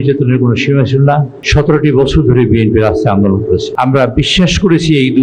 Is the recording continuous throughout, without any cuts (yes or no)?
no